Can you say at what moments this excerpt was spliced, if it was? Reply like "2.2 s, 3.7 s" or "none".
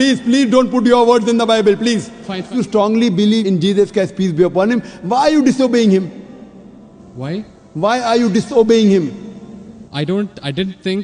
2.5 s